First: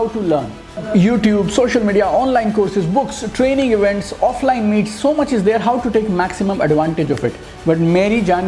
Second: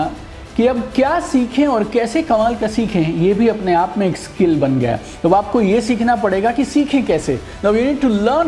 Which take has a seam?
first; 2 cuts; at 0.8 s, 7.5 s

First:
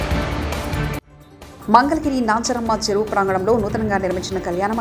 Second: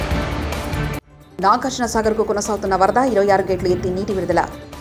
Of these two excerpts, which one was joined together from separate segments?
first; 1 cut; at 1.2 s

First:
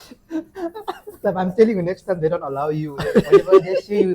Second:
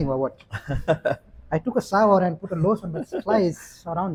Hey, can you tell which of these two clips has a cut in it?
first; 1 cut; at 1.2 s

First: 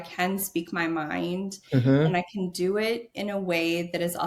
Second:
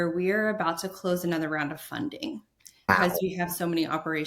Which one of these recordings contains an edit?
second; 1 cut; at 2.9 s

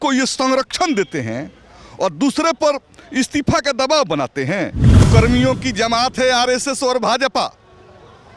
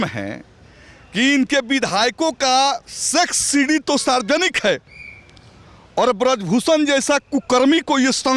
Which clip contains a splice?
first; 1 cut; at 5.0 s

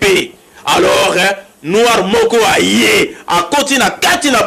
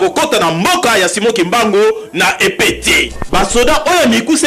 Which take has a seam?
second; 1 cut; at 3.2 s

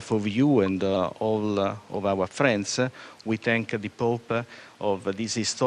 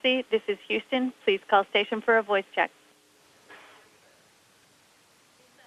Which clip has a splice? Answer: first; 1 cut; at 3.4 s

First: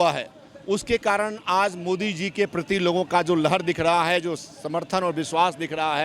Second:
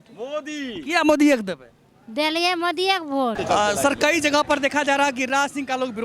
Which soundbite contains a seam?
second; 1 cut; at 3.4 s

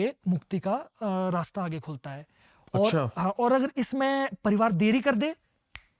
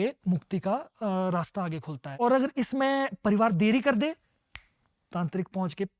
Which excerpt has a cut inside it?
second; 1 cut; at 2.2 s

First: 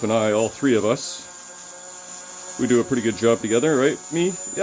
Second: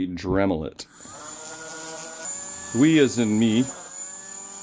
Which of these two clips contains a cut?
second; 1 cut; at 2.2 s

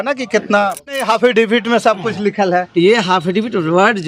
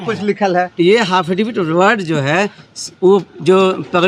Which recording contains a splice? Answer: first; 1 cut; at 1.0 s

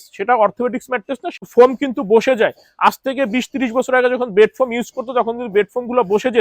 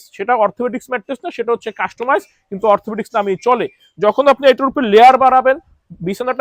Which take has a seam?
first; 1 cut; at 1.3 s

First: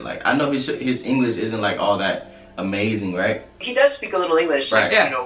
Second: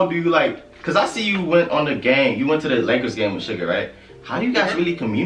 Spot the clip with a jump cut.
first; 1 cut; at 3.6 s

